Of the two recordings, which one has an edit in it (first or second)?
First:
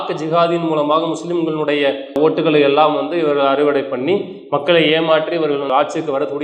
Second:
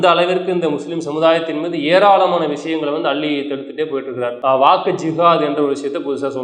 second